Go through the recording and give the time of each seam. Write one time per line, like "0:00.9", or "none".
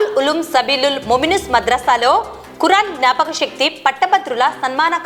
none